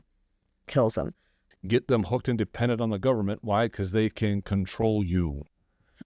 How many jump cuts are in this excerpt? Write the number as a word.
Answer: one